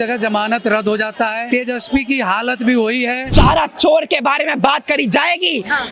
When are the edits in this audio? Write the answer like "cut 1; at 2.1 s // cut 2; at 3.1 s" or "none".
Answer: cut 1; at 1.4 s // cut 2; at 3.2 s